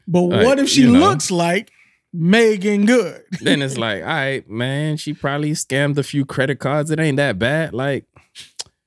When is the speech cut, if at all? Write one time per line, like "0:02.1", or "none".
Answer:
0:03.5